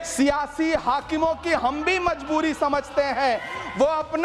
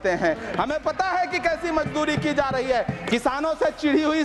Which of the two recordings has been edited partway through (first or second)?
second